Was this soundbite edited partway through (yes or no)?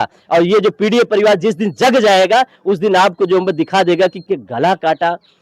yes